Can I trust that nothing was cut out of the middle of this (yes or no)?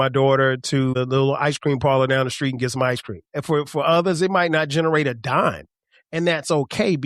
no